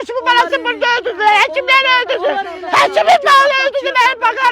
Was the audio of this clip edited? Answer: no; 0 cuts

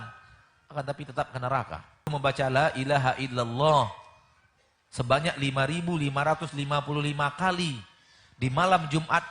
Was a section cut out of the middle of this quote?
yes; 1 cut; at 2.1 s

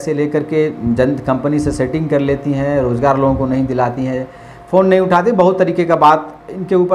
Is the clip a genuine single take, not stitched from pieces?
yes; 0 cuts

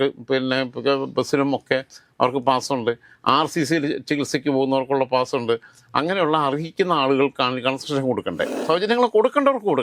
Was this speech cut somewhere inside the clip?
yes; 1 cut; at 8.6 s

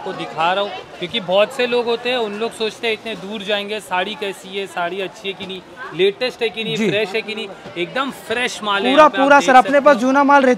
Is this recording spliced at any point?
no; 0 cuts

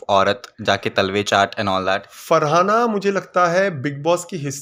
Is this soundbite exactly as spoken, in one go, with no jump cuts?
yes; 0 cuts

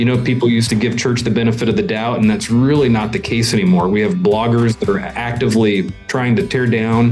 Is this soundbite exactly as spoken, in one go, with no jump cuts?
no; 1 cut; at 5.9 s

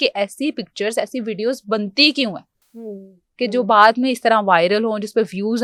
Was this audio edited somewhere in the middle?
no; 0 cuts

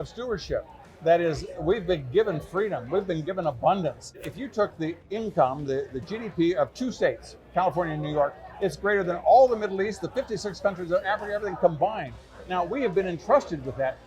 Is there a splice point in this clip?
yes; 2 cuts; at 4.3 s, 5.0 s

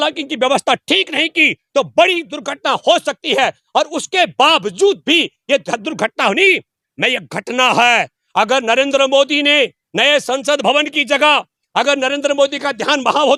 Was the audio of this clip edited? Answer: no; 0 cuts

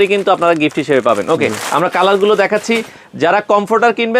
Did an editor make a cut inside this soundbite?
no; 0 cuts

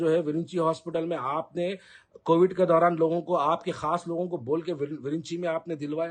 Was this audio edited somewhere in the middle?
no; 0 cuts

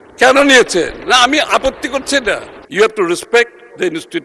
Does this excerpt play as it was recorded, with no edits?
no; 1 cut; at 2.6 s

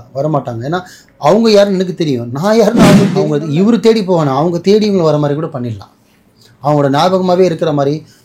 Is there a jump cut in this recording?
yes; 1 cut; at 3.2 s

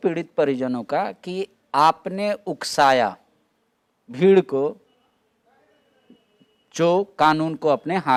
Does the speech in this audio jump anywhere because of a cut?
no; 0 cuts

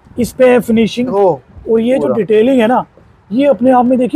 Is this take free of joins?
no; 1 cut; at 1.1 s

